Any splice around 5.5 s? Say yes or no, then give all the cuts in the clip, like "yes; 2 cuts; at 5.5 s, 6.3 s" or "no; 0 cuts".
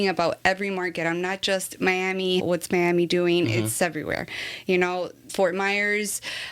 no; 2 cuts; at 2.4 s, 3.8 s